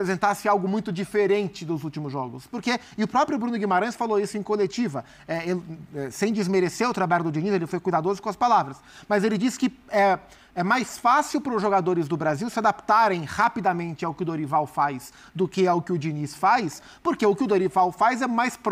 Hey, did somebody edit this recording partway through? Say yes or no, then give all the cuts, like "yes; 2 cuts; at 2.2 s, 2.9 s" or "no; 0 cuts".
no; 0 cuts